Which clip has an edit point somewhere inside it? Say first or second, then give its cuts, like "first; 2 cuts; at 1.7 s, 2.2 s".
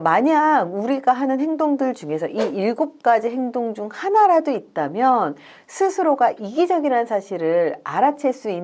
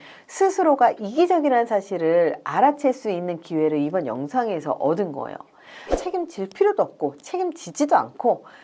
second; 1 cut; at 5.9 s